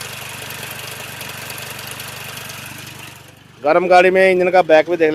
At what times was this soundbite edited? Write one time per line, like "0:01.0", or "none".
none